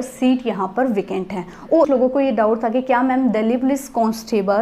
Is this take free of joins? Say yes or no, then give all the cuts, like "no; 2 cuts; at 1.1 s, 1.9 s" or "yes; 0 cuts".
no; 1 cut; at 1.8 s